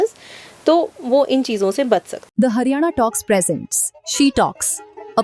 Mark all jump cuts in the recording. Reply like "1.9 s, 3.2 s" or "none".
2.2 s

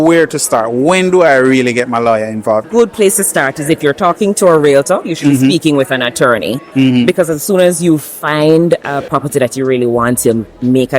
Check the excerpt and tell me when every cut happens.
2.6 s, 6.6 s

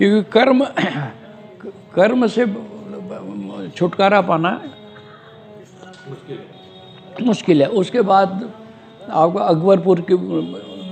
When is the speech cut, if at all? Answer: none

